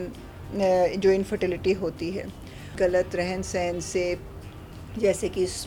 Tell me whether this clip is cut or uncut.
cut